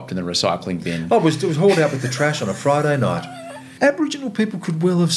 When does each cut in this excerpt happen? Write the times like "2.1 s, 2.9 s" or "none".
3.7 s

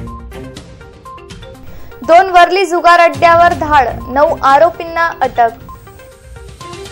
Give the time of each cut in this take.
1.4 s

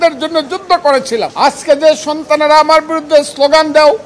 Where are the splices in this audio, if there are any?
1.3 s

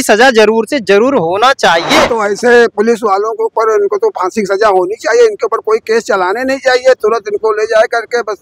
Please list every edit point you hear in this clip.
2.0 s

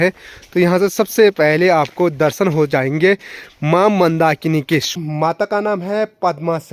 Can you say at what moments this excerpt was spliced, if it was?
4.9 s

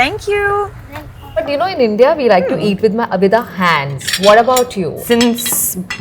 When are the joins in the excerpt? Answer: 1.4 s, 5.0 s

